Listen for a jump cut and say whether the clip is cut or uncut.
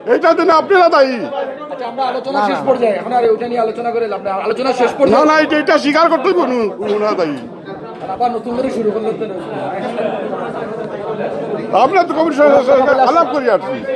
uncut